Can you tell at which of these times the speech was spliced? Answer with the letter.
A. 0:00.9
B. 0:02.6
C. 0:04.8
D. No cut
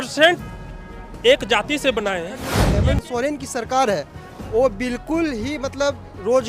B